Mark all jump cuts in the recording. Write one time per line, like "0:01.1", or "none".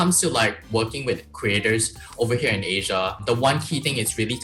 0:03.2